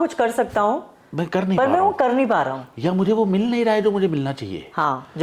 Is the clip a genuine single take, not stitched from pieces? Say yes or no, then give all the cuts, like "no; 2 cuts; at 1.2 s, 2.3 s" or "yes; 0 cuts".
yes; 0 cuts